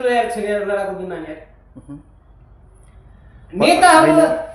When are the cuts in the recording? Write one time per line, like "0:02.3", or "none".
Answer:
none